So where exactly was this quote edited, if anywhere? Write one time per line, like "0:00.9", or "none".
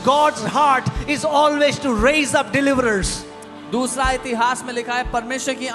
none